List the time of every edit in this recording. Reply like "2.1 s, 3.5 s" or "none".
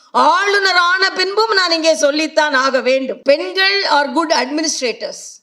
3.1 s